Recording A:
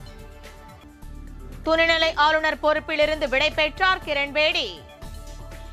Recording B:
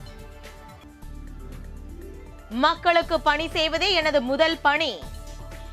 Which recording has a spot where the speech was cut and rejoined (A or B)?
B